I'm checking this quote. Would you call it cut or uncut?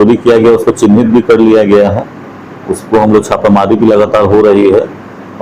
uncut